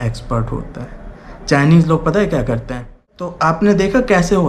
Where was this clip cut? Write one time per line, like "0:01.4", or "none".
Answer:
0:03.2